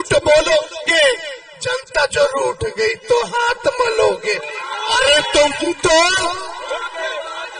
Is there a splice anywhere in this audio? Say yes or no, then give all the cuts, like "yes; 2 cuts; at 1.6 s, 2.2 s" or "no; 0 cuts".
no; 0 cuts